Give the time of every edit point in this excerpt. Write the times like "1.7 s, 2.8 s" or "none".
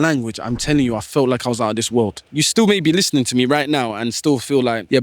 2.2 s